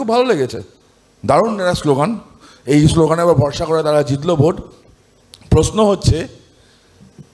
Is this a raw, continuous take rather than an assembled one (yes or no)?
yes